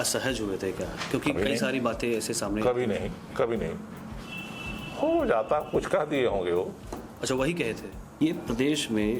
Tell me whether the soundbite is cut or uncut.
cut